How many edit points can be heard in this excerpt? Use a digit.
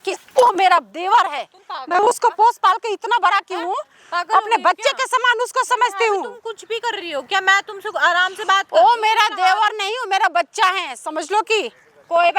0